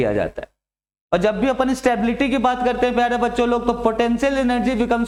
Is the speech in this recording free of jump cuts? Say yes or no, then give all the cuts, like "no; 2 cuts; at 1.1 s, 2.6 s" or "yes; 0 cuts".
yes; 0 cuts